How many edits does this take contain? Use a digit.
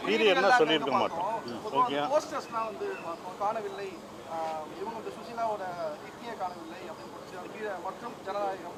0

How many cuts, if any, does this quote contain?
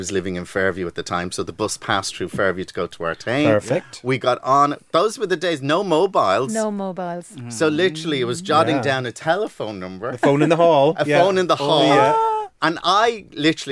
0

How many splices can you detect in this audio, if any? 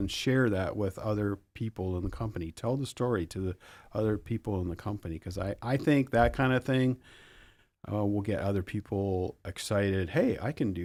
0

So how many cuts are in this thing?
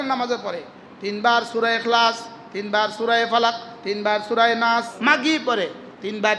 1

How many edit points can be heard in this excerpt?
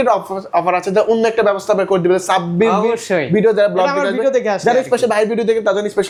0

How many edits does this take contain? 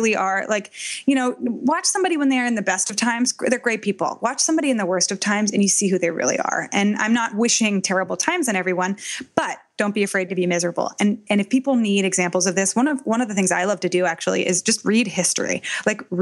0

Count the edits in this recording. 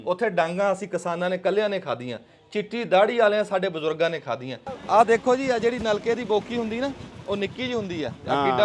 1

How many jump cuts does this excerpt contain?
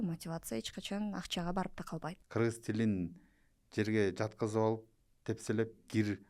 1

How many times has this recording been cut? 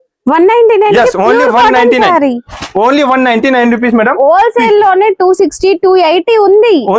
0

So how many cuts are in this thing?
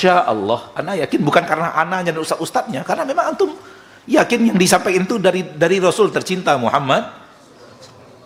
0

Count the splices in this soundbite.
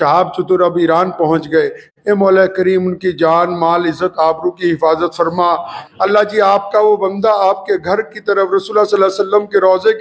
1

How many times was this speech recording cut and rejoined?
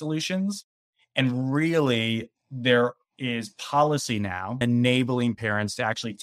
1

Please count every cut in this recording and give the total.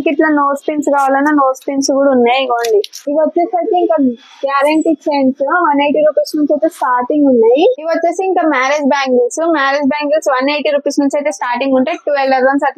2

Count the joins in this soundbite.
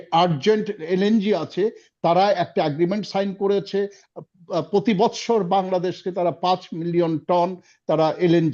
0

